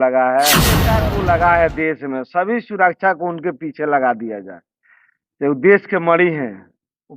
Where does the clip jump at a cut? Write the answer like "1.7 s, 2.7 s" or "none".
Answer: 0.9 s